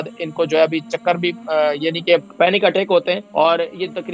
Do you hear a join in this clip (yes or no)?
yes